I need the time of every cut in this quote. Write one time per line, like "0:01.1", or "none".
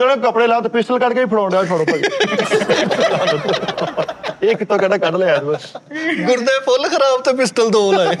none

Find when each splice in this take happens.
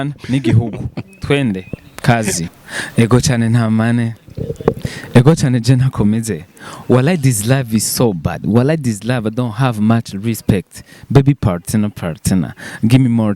0:02.4

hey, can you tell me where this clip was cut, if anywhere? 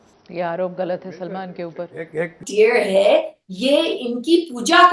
0:02.4

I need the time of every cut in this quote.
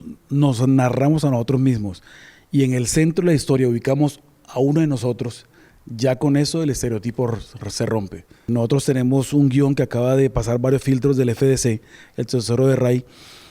0:08.5

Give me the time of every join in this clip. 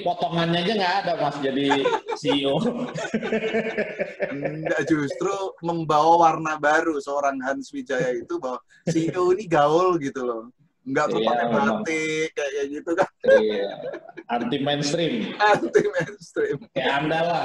none

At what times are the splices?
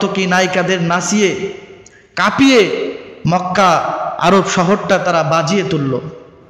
none

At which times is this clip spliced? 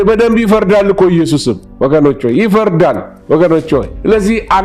none

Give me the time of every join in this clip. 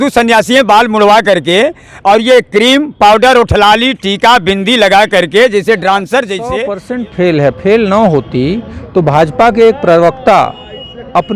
0:06.4

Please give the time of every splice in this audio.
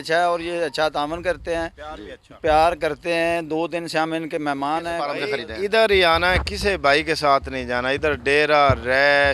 0:05.2

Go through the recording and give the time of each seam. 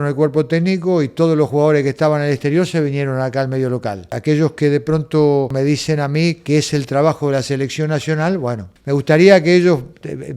0:04.2
0:05.5
0:08.7

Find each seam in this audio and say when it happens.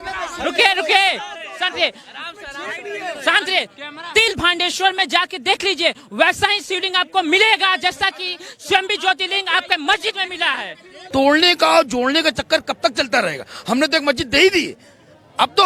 0:11.0

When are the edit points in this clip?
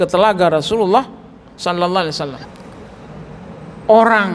0:02.4

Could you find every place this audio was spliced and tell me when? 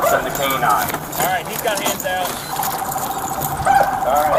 none

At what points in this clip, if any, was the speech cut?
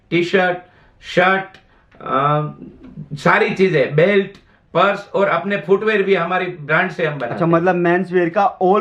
none

